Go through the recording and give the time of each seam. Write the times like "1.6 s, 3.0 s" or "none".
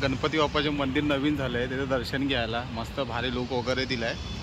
none